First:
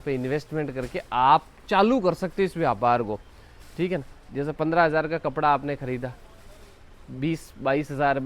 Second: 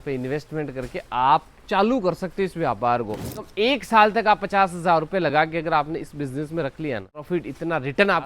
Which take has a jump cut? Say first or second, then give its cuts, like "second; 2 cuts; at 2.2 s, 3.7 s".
second; 2 cuts; at 3.4 s, 7.2 s